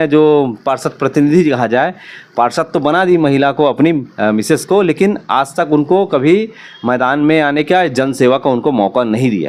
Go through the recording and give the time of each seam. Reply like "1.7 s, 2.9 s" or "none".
none